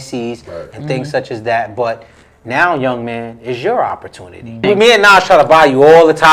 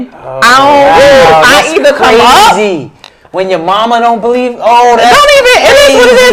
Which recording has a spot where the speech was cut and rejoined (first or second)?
first